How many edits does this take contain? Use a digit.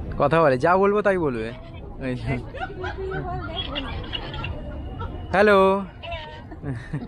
0